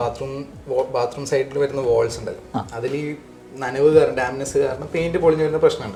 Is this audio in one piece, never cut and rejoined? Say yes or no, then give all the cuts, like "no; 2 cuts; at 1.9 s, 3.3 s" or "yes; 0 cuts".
yes; 0 cuts